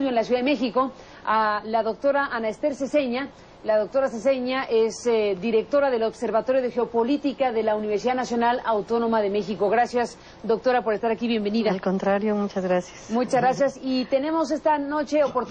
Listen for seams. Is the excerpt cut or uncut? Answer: cut